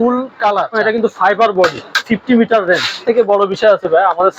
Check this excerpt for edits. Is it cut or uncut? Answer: cut